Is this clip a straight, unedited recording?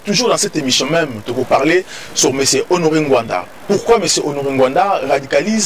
yes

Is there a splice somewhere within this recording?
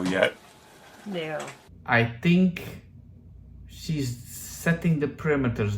yes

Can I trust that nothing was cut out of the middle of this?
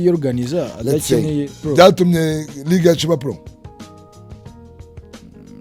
no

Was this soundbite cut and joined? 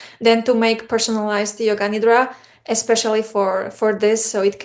no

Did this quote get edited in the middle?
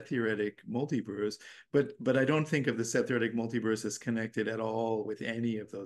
no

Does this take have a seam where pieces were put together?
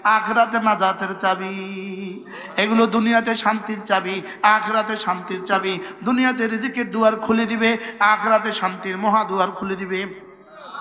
no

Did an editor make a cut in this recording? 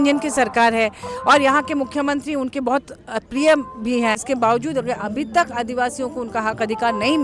yes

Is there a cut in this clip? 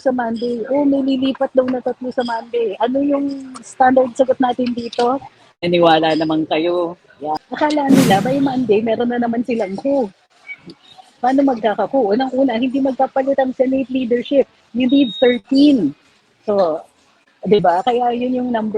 yes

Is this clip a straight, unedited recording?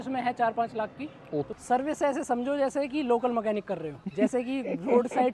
no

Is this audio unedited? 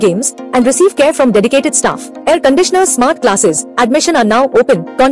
yes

